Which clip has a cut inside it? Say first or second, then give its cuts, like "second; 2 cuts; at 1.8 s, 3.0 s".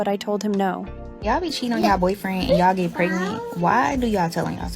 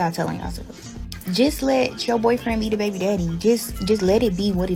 first; 1 cut; at 1.1 s